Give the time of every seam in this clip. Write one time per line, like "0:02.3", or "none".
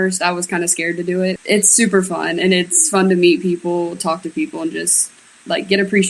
0:01.4